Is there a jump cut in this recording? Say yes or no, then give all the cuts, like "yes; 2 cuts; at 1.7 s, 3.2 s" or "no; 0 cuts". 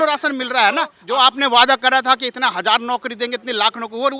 yes; 1 cut; at 1.0 s